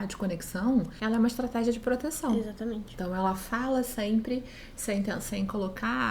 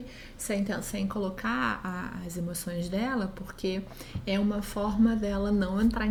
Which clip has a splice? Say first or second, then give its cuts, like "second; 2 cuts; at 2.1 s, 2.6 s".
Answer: first; 1 cut; at 2.9 s